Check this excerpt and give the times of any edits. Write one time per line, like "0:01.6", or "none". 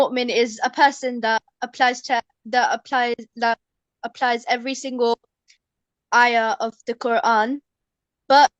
none

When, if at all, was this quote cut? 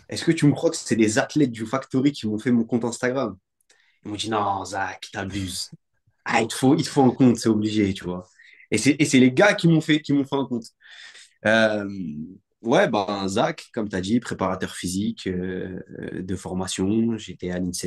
none

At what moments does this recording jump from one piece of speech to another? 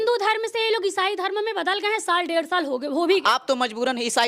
0:03.2

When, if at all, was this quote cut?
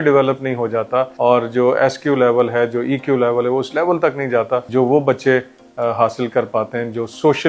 0:01.1
0:04.7

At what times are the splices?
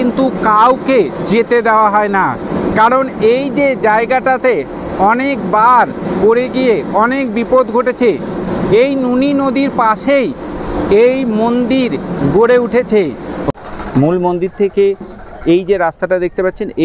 none

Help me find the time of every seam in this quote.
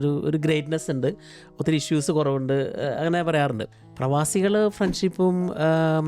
none

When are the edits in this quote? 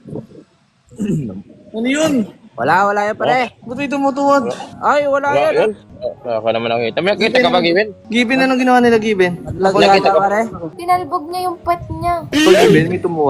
0:10.7
0:12.4

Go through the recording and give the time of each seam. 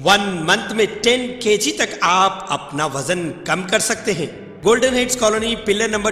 0:04.4

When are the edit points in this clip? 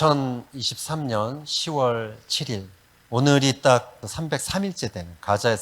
0:04.1

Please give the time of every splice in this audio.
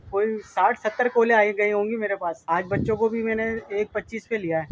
0:02.4

